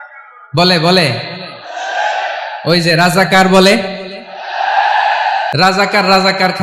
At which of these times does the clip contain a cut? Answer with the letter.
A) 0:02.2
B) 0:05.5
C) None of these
B